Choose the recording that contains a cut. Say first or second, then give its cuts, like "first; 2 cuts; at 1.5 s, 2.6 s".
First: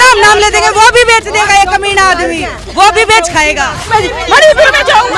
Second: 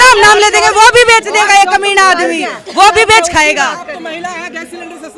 first; 1 cut; at 3.9 s